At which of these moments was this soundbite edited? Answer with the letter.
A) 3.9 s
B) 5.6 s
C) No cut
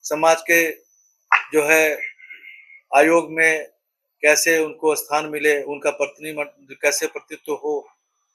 C